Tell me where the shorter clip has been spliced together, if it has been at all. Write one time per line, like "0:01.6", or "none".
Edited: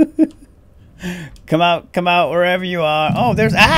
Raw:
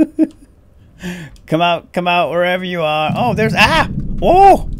none